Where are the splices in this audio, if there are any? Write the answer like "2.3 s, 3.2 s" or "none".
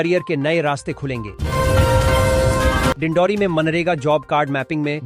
1.3 s, 3.0 s